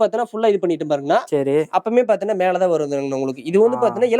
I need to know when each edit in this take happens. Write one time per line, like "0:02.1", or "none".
none

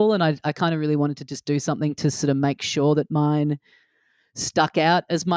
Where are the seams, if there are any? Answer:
none

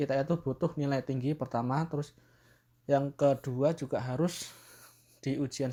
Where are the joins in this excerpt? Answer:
none

